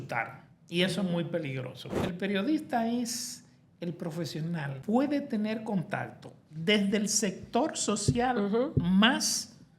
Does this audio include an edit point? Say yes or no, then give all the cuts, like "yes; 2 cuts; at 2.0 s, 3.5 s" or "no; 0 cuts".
yes; 2 cuts; at 2.0 s, 4.7 s